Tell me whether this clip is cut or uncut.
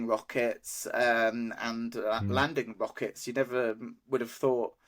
uncut